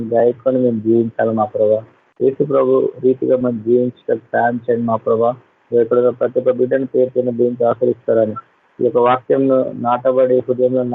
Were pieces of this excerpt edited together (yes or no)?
no